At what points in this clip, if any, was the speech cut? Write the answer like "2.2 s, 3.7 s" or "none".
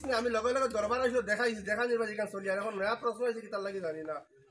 none

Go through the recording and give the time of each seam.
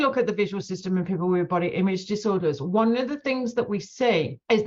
none

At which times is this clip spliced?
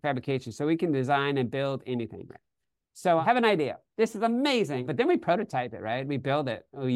3.2 s, 4.9 s

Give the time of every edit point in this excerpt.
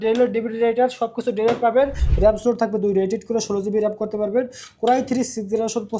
2.0 s

